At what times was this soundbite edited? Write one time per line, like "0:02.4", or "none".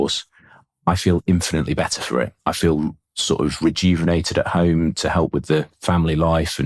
none